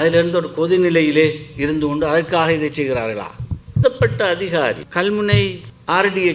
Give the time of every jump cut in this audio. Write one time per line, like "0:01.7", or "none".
0:03.8